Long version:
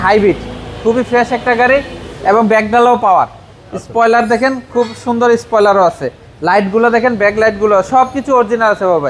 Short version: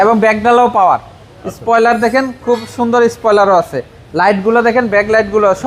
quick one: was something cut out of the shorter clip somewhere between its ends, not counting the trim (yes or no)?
no